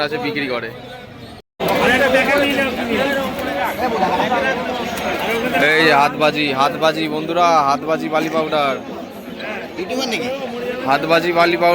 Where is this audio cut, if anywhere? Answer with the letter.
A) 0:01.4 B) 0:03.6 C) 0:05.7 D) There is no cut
A